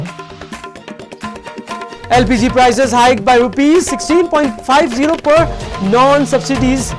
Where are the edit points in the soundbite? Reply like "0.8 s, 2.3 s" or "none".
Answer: 1.2 s